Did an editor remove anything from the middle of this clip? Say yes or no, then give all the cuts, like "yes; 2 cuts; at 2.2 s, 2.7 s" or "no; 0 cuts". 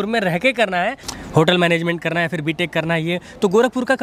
yes; 1 cut; at 1.0 s